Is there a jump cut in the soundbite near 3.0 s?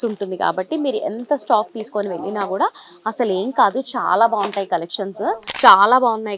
no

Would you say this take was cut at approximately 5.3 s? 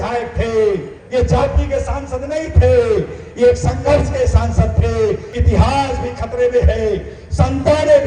yes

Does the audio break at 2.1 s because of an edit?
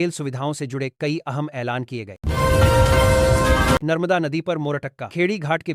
yes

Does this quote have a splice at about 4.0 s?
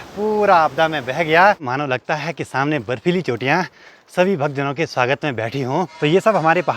no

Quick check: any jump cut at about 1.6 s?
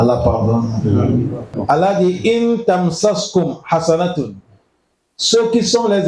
yes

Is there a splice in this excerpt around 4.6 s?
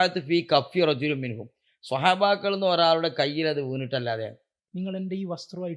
yes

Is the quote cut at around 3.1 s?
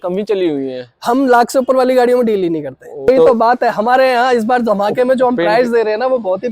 yes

